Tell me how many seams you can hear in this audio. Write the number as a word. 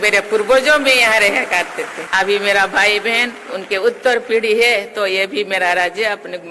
one